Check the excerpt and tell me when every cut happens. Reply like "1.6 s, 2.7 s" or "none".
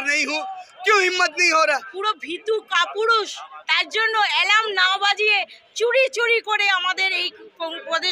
1.9 s

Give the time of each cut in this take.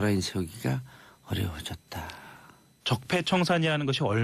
1.2 s

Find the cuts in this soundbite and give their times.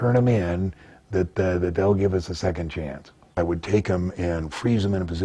3.2 s

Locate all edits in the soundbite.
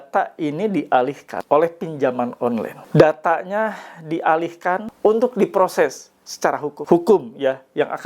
1.3 s, 2.8 s, 4.9 s, 6.7 s

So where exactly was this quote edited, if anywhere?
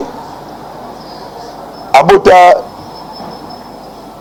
none

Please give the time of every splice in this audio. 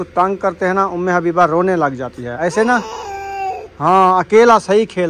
2.3 s

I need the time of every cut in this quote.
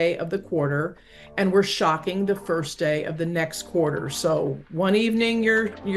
none

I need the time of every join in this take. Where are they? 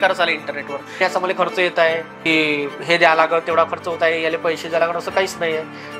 1.0 s, 2.2 s

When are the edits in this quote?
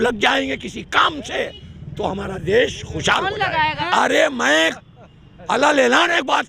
3.8 s

